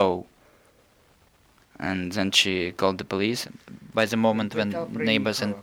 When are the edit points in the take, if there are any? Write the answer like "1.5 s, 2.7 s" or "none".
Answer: 3.5 s